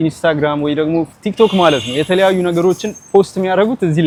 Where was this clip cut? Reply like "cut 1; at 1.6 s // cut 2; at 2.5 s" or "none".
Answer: none